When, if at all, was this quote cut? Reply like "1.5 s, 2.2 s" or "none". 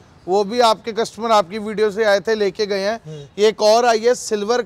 none